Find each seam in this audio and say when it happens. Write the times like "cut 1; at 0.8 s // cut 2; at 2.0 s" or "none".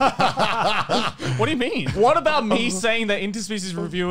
cut 1; at 1.9 s